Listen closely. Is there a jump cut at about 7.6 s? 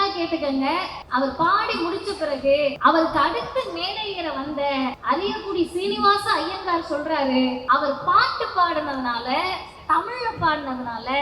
yes; 4 cuts; at 1.0 s, 2.8 s, 5.0 s, 7.6 s

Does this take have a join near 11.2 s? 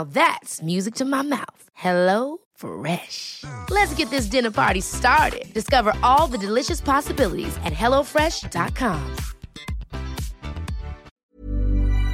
yes; 1 cut; at 11.2 s

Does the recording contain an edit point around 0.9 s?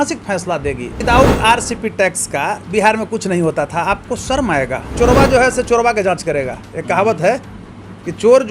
yes; 2 cuts; at 0.9 s, 4.9 s

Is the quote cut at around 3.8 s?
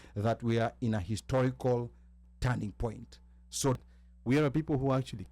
yes; 1 cut; at 3.8 s

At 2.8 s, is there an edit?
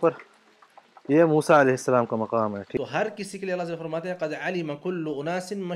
yes; 1 cut; at 2.8 s

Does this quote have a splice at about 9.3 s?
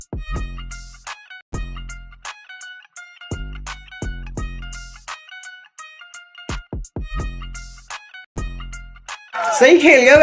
yes; 1 cut; at 9.3 s

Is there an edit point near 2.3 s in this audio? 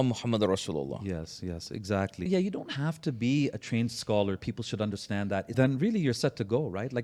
yes; 2 cuts; at 2.3 s, 5.5 s

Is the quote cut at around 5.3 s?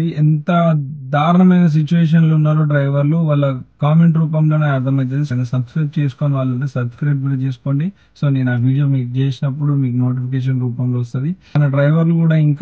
yes; 2 cuts; at 5.3 s, 11.6 s

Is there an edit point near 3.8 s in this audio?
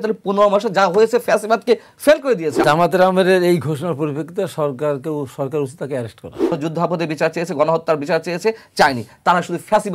no; 2 cuts; at 2.6 s, 6.5 s

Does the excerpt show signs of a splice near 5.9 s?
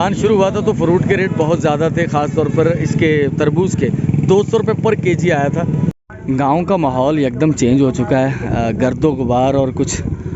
yes; 1 cut; at 5.9 s

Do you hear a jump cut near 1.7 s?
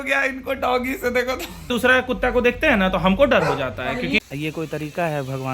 yes; 2 cuts; at 1.7 s, 4.2 s

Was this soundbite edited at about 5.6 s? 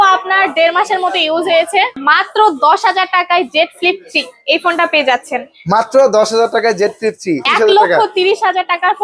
no; 2 cuts; at 2.0 s, 7.5 s

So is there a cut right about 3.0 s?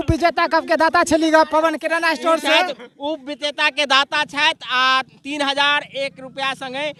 no; 0 cuts

